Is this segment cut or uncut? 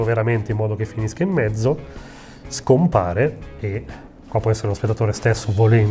uncut